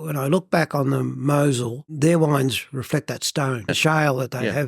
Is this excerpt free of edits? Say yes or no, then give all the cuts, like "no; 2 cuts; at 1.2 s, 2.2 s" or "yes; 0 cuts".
no; 1 cut; at 3.7 s